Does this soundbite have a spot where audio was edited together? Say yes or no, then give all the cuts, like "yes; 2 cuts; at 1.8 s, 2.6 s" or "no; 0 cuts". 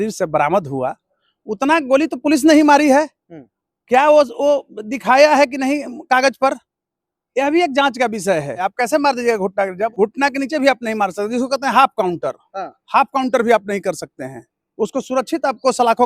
yes; 2 cuts; at 8.7 s, 9.9 s